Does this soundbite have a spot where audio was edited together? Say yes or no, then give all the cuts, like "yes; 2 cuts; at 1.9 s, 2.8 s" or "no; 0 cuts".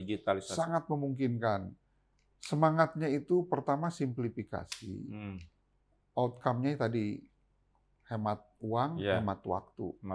no; 0 cuts